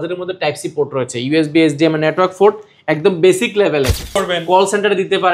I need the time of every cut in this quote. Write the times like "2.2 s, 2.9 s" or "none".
4.2 s